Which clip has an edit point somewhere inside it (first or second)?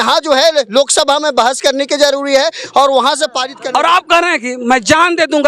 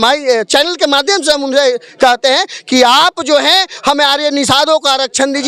first